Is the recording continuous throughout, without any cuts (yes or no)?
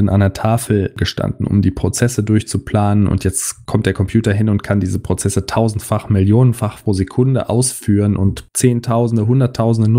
yes